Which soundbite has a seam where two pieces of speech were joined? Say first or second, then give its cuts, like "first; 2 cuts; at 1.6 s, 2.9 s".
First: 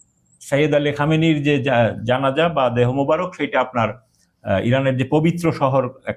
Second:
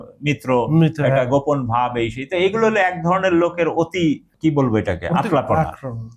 second; 1 cut; at 4.3 s